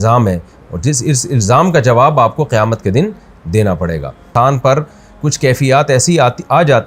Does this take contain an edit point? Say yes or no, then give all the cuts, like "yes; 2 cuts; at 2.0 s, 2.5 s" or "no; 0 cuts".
yes; 1 cut; at 4.3 s